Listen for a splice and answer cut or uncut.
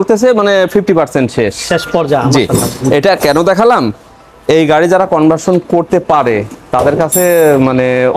uncut